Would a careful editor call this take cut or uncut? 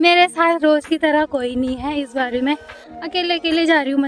uncut